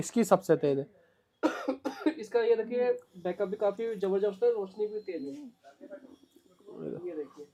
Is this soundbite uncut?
yes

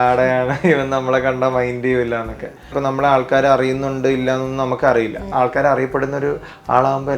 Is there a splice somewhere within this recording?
yes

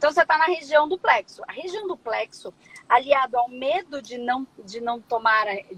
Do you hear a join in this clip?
no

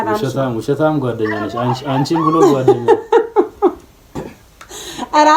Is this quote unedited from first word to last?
yes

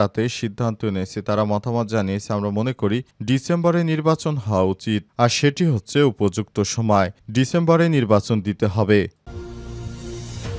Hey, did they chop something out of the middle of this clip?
yes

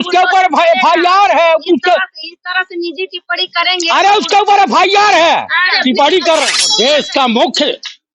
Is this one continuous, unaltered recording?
no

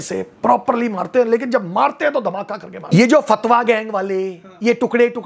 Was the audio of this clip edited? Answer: yes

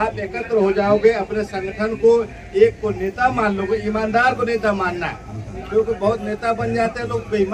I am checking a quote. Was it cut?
no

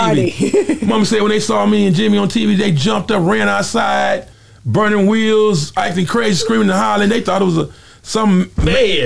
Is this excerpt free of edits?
yes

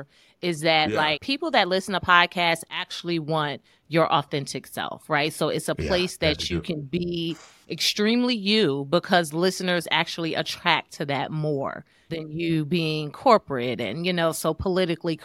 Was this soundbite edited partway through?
yes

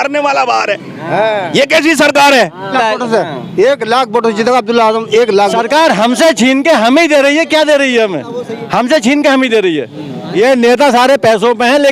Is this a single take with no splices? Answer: no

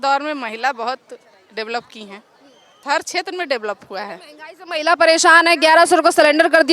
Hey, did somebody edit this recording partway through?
yes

